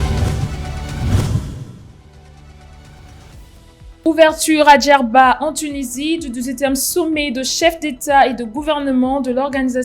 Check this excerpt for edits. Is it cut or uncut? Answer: cut